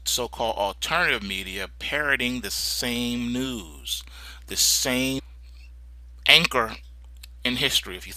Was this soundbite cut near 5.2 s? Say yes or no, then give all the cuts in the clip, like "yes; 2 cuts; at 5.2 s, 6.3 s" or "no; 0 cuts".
no; 0 cuts